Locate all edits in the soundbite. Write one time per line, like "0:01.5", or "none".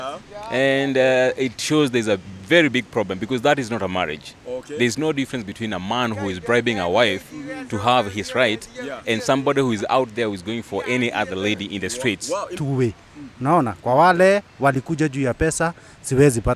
0:12.5